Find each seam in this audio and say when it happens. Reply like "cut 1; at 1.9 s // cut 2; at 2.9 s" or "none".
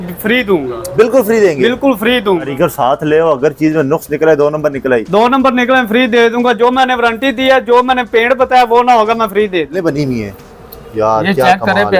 cut 1; at 2.5 s // cut 2; at 9.7 s

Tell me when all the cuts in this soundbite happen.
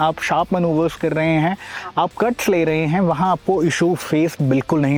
none

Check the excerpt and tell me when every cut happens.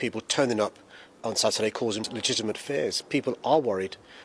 cut 1; at 2.0 s

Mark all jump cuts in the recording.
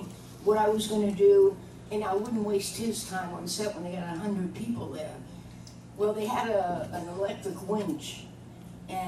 none

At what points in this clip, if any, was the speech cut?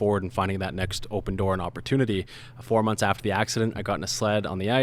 cut 1; at 2.4 s

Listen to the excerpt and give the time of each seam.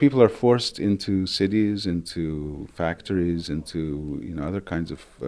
none

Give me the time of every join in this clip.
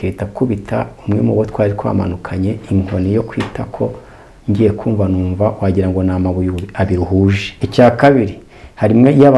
cut 1; at 7.6 s

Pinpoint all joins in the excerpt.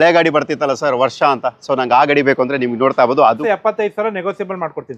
cut 1; at 3.2 s

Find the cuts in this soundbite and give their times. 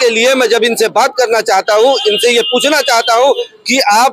none

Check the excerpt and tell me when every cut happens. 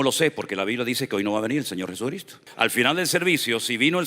cut 1; at 2.4 s

